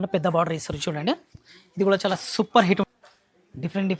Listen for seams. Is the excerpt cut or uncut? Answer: cut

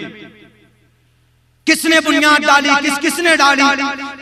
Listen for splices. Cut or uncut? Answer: uncut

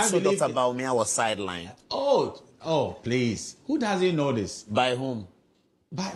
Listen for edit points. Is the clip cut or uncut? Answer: uncut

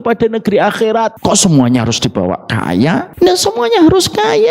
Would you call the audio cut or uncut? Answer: cut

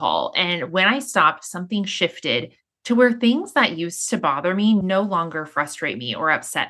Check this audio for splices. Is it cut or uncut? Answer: cut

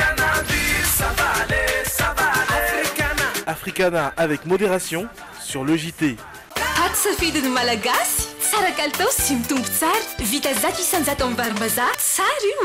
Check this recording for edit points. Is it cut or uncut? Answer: uncut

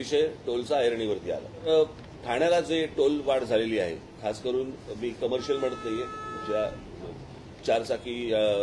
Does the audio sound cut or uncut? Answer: cut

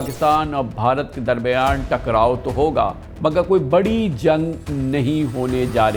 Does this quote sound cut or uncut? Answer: uncut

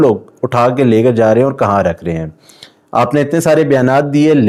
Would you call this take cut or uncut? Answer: uncut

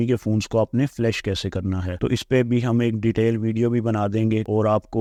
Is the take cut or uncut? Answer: uncut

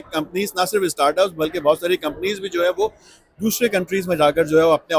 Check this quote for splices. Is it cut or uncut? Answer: uncut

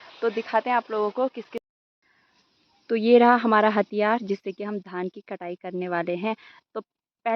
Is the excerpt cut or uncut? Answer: cut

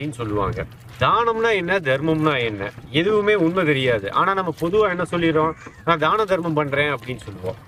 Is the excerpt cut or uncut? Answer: uncut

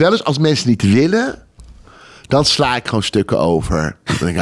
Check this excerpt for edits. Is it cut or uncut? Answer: uncut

